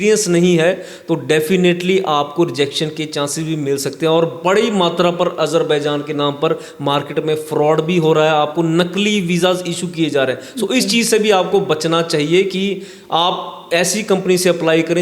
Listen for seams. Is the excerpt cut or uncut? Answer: uncut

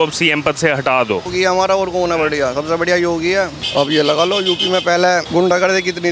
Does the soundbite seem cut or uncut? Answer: cut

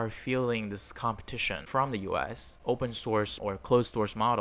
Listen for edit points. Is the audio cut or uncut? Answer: cut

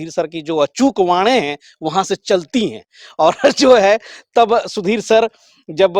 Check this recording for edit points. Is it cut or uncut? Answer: uncut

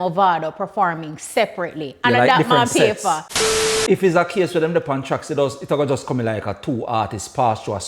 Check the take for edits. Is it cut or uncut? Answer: cut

